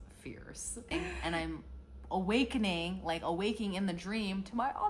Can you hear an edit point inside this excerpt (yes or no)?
yes